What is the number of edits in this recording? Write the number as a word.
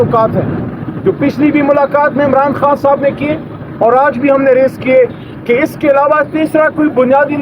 zero